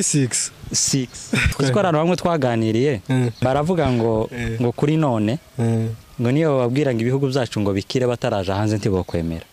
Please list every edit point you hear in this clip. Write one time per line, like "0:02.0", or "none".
0:01.5
0:03.4